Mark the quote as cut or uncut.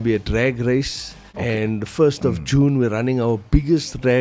cut